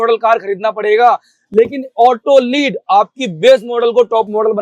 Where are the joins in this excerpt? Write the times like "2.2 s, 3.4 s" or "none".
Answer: none